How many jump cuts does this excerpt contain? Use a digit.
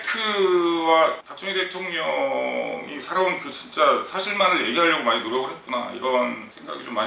0